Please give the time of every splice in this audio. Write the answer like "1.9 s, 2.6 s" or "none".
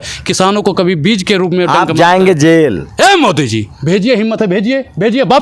none